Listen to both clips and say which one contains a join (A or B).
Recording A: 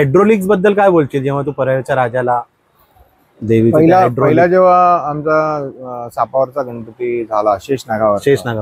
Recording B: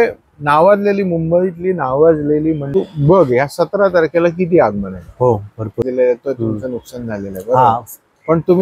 B